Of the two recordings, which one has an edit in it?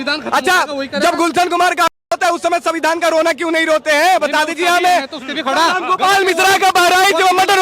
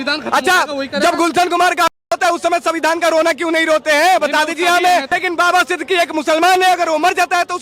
second; 1 cut; at 5.1 s

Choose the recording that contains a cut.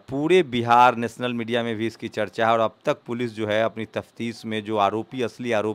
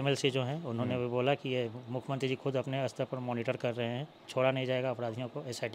second; 1 cut; at 4.2 s

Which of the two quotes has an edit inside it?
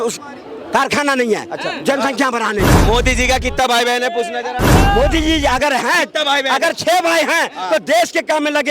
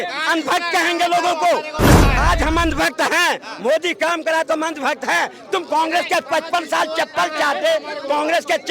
first; 2 cuts; at 2.8 s, 4.7 s

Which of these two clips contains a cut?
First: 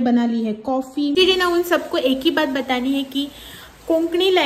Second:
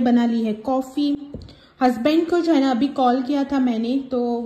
first; 1 cut; at 1.2 s

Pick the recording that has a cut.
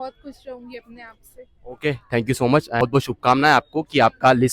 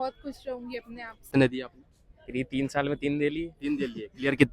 second; 1 cut; at 1.3 s

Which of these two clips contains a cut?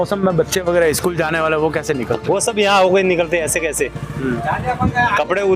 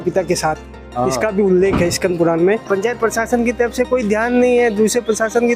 second; 1 cut; at 2.6 s

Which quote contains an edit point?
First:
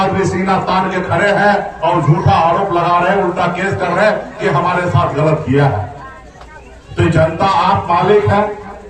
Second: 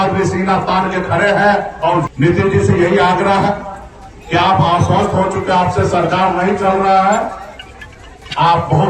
second; 1 cut; at 2.0 s

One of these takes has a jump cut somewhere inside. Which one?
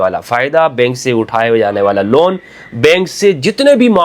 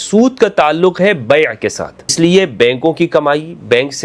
second; 1 cut; at 2.0 s

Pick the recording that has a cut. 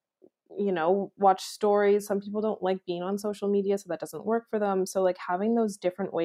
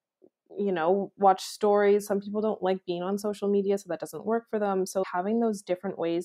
second; 1 cut; at 5.0 s

